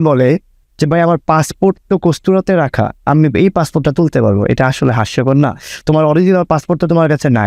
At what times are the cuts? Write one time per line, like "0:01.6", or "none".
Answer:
none